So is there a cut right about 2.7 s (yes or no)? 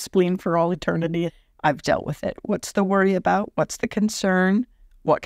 no